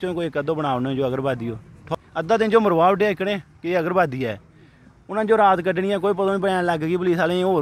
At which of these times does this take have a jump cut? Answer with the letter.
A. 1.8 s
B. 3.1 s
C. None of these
A